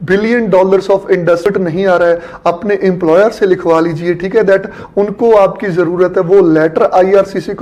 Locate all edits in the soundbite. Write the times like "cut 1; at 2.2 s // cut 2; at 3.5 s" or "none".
cut 1; at 1.5 s